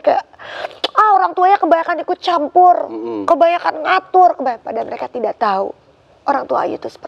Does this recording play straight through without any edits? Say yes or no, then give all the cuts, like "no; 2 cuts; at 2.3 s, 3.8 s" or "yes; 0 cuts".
yes; 0 cuts